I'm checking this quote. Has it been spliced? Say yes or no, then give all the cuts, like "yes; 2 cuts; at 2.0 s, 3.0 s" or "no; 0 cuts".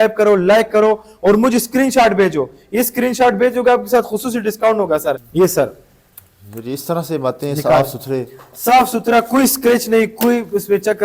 yes; 1 cut; at 5.2 s